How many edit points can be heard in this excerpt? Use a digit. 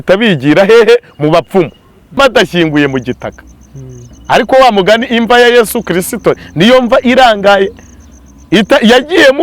1